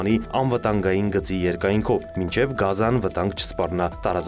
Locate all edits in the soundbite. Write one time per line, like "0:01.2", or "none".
none